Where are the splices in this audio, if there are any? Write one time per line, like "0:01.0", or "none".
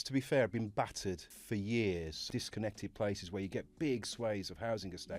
0:02.1

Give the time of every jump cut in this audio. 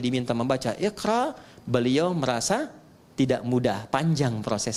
none

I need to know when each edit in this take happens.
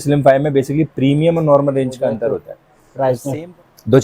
0:02.5

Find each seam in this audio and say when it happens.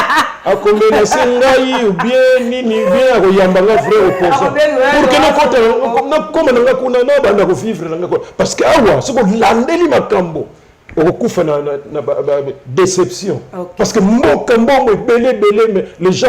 none

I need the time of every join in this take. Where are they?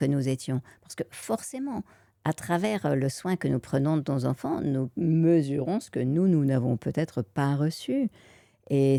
none

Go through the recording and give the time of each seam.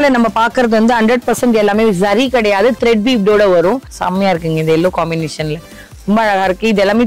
0:03.9

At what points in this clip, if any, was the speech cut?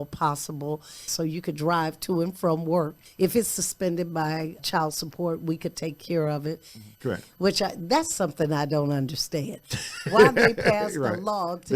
0:01.1
0:03.0
0:06.9

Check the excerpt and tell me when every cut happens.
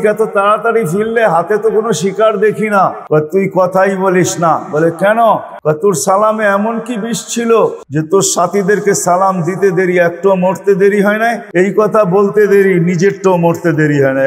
0:03.0
0:05.5
0:07.8
0:11.4

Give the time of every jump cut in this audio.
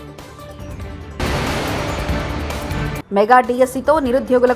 0:01.2
0:02.8

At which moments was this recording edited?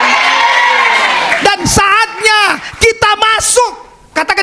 none

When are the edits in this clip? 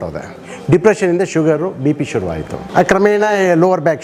0:02.6

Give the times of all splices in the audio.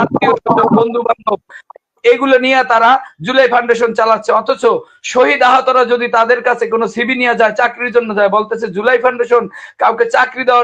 none

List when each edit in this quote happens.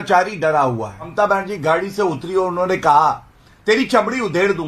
0:01.1

